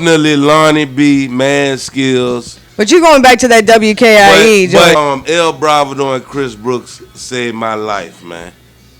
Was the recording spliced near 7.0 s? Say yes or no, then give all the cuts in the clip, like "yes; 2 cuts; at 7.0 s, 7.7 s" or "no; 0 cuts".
no; 1 cut; at 5.0 s